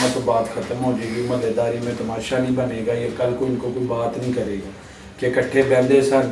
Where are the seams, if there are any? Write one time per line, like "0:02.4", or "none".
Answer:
none